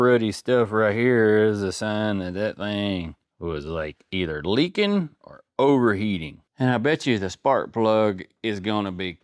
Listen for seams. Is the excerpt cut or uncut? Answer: cut